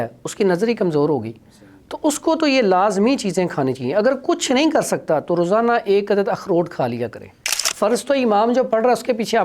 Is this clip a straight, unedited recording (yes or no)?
no